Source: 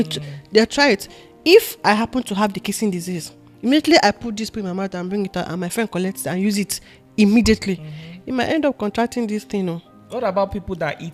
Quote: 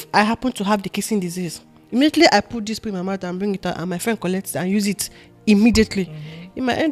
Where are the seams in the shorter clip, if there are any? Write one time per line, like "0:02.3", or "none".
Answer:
none